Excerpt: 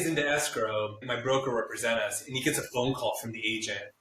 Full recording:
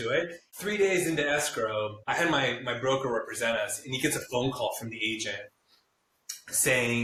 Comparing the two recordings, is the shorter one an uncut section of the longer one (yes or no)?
no